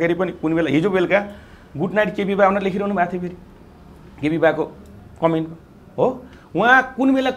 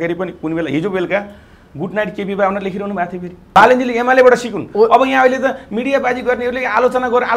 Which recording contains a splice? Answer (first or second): second